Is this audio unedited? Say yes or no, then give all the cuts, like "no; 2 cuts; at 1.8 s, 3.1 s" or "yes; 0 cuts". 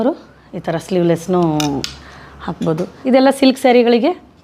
no; 1 cut; at 2.9 s